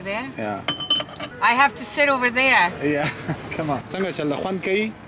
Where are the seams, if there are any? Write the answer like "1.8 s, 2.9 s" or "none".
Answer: 1.2 s, 3.9 s